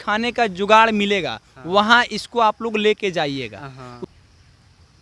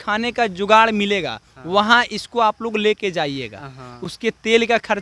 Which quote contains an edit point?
first; 1 cut; at 4.0 s

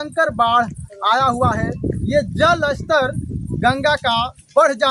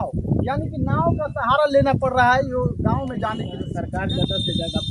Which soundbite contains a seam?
second; 1 cut; at 3.6 s

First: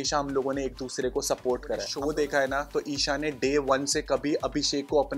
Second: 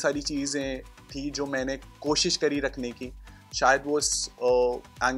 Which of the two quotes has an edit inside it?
first; 1 cut; at 1.9 s

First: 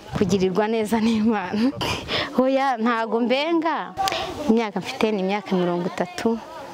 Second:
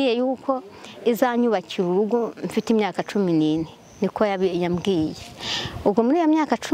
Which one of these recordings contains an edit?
first; 1 cut; at 3.9 s

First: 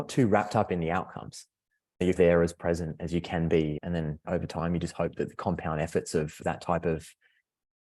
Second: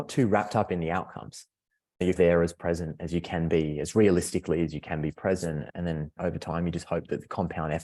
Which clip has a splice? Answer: first; 1 cut; at 3.8 s

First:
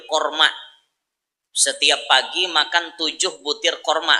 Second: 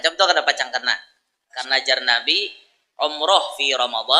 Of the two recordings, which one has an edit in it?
second; 1 cut; at 1.6 s

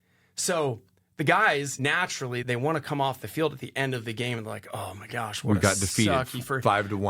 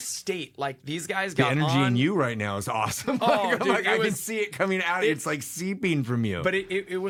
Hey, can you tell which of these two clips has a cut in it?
first; 1 cut; at 1.9 s

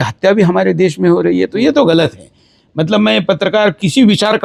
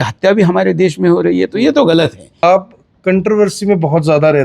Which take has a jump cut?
second; 1 cut; at 2.4 s

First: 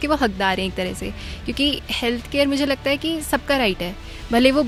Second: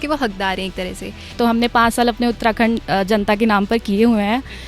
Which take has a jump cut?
second; 1 cut; at 1.3 s

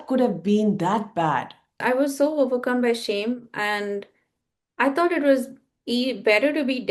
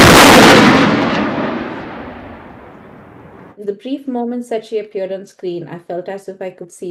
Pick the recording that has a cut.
first; 1 cut; at 1.7 s

